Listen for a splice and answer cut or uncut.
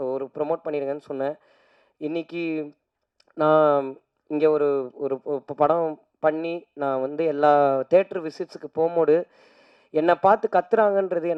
uncut